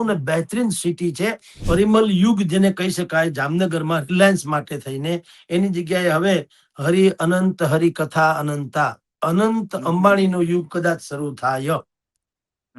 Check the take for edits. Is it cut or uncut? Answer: cut